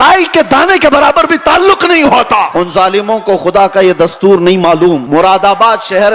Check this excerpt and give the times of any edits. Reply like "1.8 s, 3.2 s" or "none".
2.5 s, 5.0 s